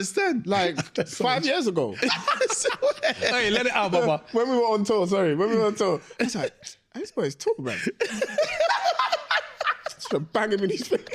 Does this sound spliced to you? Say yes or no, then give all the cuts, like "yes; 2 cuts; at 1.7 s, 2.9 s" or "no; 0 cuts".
no; 0 cuts